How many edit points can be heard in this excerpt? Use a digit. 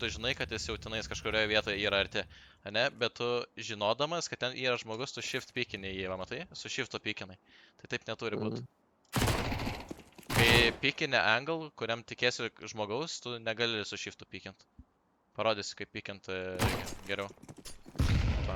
0